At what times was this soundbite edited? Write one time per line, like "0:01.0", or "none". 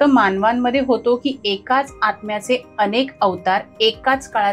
none